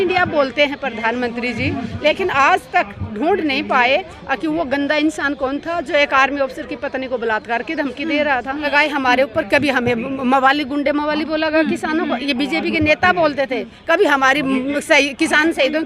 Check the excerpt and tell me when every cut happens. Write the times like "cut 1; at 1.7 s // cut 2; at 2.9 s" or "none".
cut 1; at 8.7 s

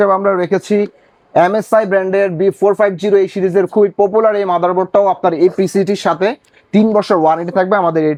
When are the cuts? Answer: none

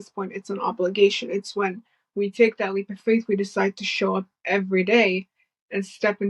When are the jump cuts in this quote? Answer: none

